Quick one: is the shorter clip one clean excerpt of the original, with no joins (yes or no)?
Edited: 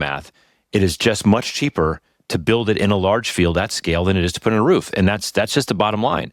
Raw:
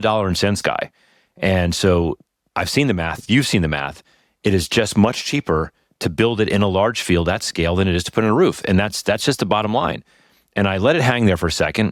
yes